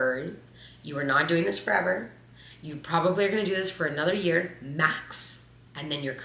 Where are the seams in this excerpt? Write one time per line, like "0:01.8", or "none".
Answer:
none